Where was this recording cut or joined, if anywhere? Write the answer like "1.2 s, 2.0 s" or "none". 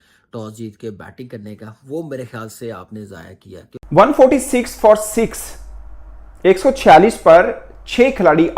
3.8 s